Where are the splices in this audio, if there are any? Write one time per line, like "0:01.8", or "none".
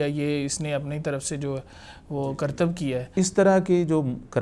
0:03.1